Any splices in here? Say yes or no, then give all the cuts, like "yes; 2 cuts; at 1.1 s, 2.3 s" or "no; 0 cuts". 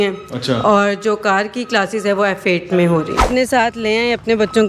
yes; 1 cut; at 3.3 s